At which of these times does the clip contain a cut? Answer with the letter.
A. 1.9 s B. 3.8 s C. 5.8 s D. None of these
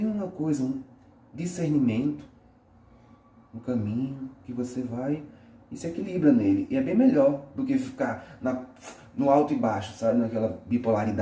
D